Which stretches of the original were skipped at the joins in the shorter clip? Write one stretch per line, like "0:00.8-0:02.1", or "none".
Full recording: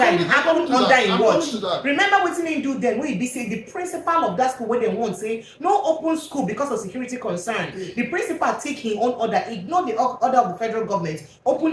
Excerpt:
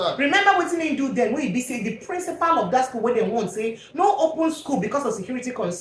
none